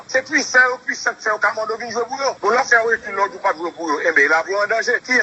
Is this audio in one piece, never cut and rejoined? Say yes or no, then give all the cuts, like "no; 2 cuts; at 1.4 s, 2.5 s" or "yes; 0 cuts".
yes; 0 cuts